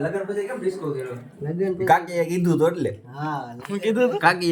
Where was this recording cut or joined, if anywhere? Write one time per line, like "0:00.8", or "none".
none